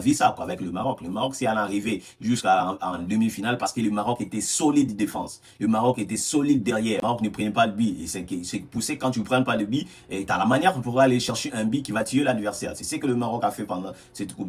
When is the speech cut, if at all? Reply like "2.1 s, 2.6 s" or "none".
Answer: none

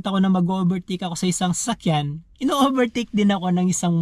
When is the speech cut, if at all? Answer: none

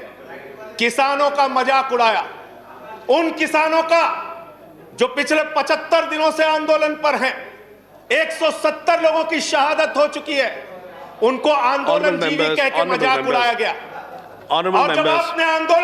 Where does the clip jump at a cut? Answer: none

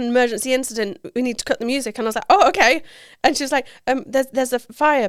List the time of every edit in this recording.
none

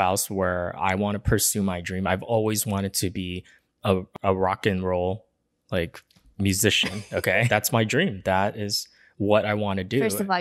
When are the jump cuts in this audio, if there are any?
4.1 s, 7.5 s

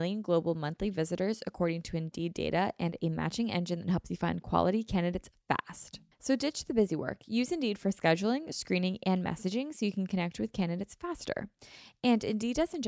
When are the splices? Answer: none

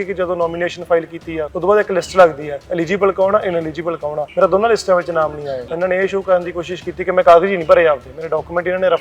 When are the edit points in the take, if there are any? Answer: 1.5 s, 4.2 s, 5.6 s

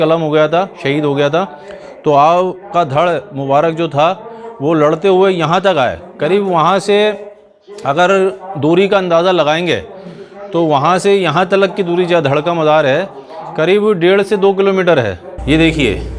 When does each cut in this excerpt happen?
15.3 s

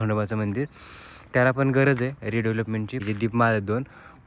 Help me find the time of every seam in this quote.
3.0 s

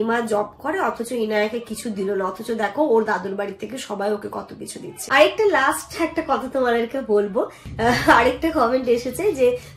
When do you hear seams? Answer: 4.9 s, 7.6 s

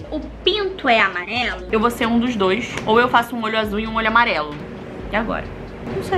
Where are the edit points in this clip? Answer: none

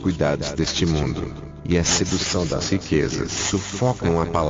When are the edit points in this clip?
3.4 s

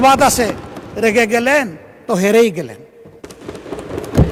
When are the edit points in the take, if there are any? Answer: none

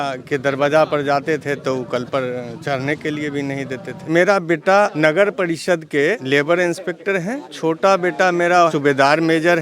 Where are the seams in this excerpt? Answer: 4.0 s, 4.9 s, 6.2 s, 8.7 s

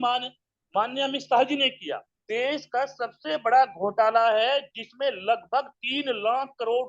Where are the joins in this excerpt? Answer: 2.1 s

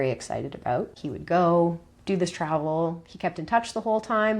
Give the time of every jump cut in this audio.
1.1 s

